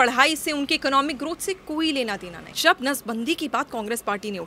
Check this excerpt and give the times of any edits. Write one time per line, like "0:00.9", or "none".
0:02.5